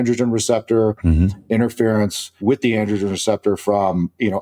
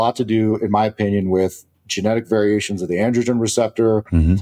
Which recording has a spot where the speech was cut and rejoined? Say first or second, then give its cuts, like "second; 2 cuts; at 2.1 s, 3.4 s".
first; 1 cut; at 2.3 s